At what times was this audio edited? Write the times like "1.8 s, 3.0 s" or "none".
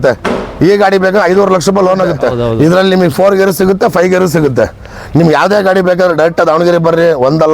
2.4 s